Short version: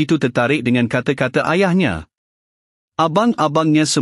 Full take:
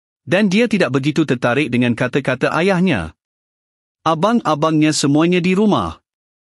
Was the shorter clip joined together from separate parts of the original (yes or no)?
no